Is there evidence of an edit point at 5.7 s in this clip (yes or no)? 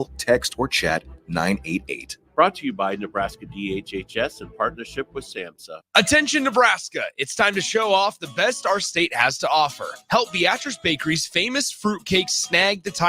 yes